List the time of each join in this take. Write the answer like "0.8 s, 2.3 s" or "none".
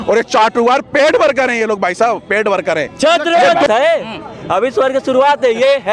3.7 s